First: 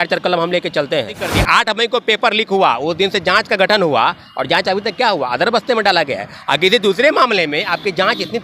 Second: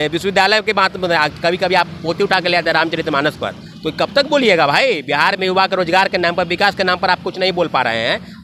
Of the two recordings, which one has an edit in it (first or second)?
first